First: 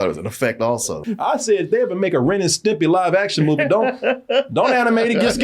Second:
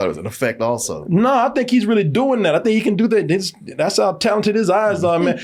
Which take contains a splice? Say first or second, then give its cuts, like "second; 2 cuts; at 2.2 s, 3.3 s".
first; 1 cut; at 1.0 s